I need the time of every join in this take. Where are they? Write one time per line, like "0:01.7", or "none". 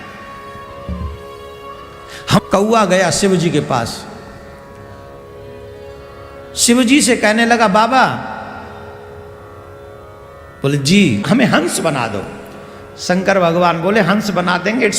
0:02.4
0:11.2

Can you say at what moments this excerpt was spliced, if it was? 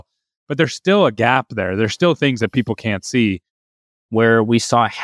0:03.7

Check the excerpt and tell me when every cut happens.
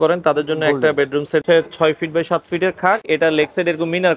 0:01.4
0:03.0

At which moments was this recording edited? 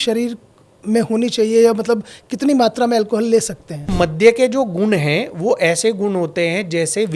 0:03.9

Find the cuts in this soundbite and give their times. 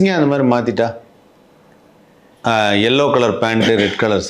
none

